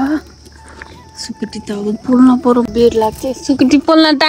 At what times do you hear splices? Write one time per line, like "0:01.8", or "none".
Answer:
0:02.7

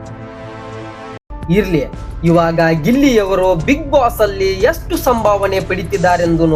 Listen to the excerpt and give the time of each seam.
0:01.1

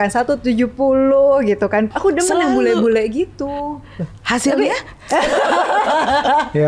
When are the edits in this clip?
0:01.9

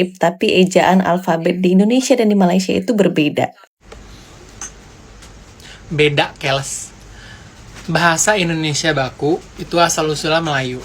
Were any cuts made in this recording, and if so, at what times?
0:03.6

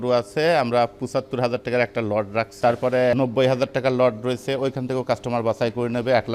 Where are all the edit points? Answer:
0:02.7

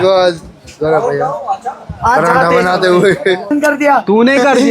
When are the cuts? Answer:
0:03.5

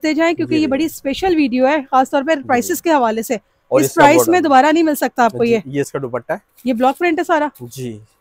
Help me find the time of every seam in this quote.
none

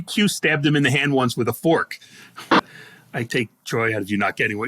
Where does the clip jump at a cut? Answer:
0:02.5

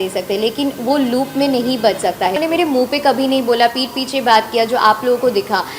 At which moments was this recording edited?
0:02.4

